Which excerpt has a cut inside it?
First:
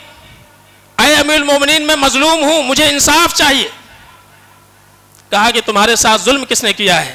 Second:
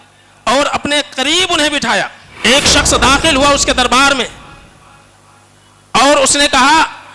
second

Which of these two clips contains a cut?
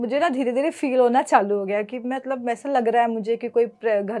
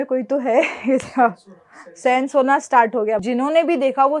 second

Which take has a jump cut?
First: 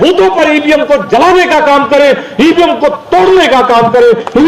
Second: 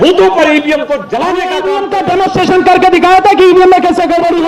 second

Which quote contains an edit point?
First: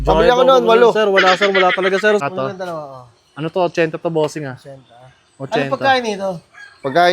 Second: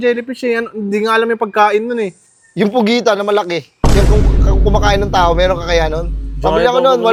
first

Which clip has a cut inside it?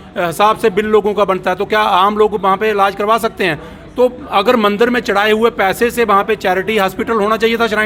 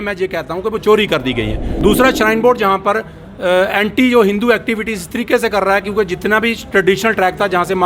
second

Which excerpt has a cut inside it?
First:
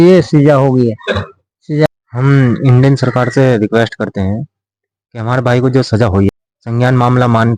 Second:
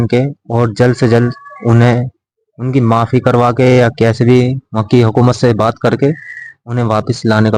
first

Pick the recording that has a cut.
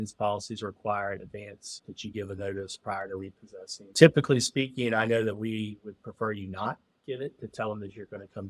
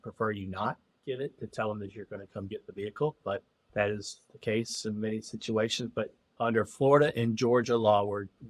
first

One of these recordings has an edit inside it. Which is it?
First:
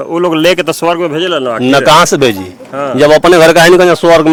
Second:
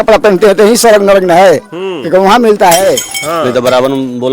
second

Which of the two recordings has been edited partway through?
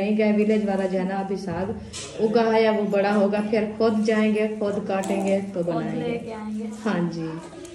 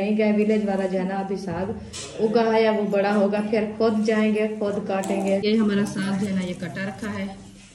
second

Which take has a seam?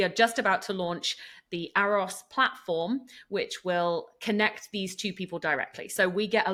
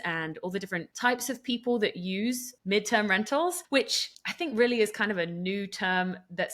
second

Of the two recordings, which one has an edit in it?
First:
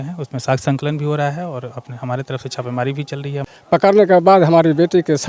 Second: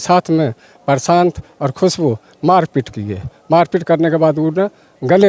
first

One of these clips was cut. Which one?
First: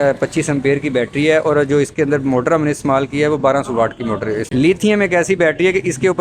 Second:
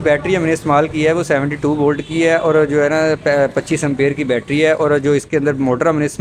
first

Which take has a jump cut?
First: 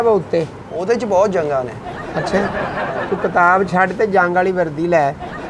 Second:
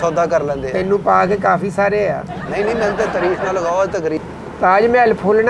second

